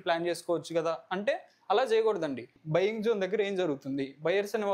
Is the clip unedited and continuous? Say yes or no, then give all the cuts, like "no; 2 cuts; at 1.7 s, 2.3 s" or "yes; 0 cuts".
no; 1 cut; at 2.5 s